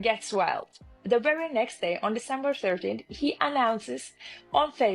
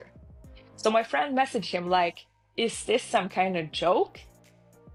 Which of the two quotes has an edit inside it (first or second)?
first